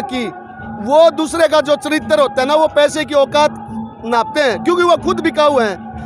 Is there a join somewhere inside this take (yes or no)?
no